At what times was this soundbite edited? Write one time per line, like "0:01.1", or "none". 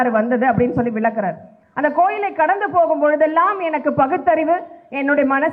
none